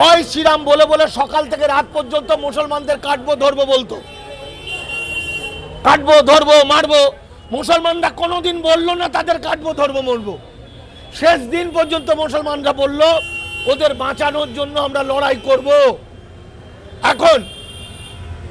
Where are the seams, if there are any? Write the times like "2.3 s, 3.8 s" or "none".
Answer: none